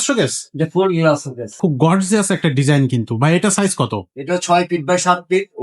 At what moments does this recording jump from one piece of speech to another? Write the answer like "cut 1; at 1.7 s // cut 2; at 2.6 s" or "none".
cut 1; at 1.5 s